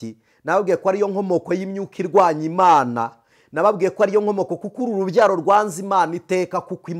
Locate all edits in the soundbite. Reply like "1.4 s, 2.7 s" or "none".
none